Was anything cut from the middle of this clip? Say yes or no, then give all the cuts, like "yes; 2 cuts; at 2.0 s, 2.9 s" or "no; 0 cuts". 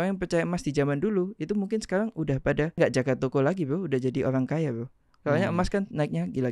yes; 1 cut; at 2.8 s